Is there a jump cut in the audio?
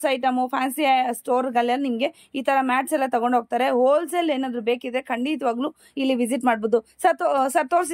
no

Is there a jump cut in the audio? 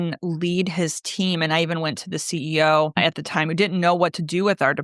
yes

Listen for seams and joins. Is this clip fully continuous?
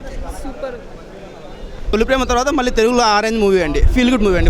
no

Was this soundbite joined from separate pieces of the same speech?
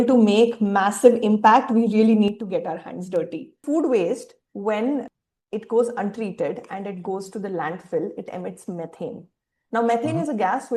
yes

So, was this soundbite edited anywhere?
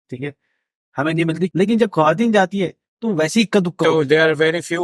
yes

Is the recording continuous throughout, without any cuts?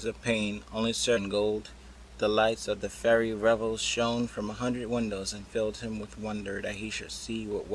yes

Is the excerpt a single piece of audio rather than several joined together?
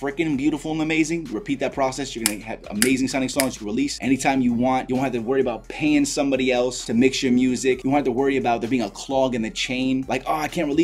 yes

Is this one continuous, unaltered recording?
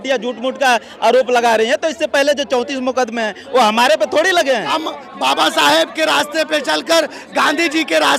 no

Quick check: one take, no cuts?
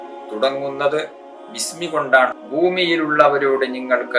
no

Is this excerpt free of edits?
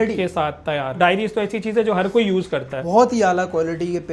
no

